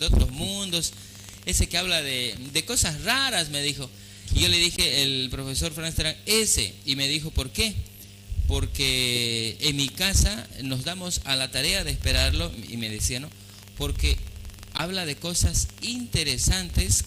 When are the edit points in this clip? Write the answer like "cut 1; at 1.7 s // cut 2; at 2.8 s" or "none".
cut 1; at 8.7 s